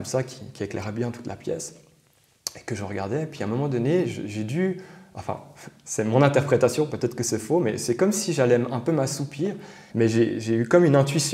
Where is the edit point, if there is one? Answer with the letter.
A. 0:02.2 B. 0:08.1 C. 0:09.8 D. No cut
C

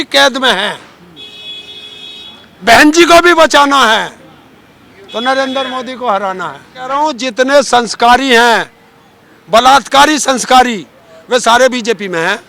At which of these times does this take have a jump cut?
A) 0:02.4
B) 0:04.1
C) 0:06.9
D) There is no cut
C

